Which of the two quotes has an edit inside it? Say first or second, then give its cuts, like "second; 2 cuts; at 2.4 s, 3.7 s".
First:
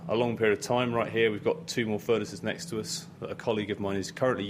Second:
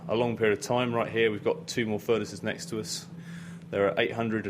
second; 1 cut; at 3.2 s